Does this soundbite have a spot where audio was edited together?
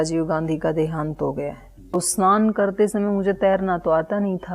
yes; 1 cut; at 1.9 s

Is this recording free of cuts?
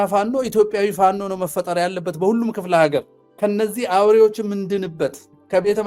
no; 1 cut; at 3.2 s

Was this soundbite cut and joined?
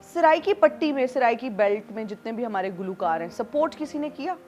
no; 0 cuts

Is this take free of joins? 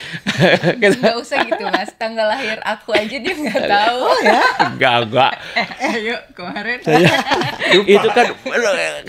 yes; 0 cuts

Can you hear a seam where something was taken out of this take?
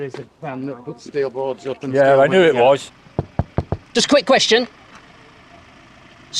yes; 1 cut; at 2.9 s

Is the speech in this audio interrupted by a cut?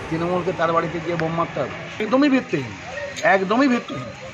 yes; 1 cut; at 2.0 s

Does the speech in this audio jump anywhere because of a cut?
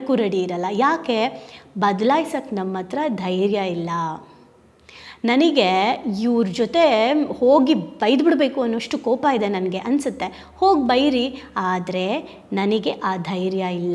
no; 0 cuts

